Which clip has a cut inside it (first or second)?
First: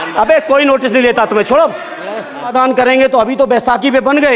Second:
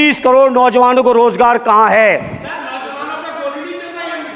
first